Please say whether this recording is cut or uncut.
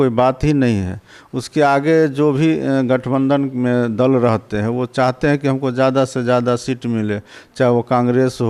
uncut